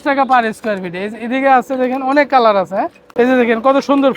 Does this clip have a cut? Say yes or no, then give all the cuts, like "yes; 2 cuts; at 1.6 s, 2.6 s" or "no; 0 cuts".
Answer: yes; 1 cut; at 3.0 s